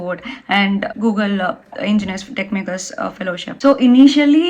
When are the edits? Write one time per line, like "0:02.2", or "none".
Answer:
0:00.9
0:03.5